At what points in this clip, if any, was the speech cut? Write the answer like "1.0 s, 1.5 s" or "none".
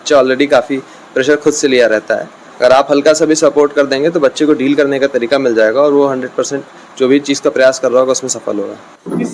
none

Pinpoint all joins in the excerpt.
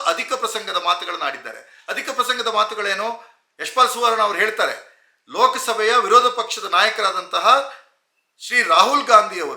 none

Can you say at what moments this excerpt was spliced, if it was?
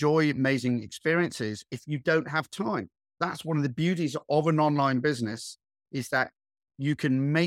3.2 s

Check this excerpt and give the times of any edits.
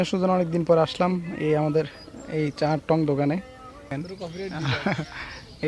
3.9 s

